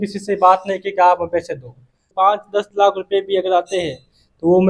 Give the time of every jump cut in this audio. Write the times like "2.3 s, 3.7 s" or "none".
2.1 s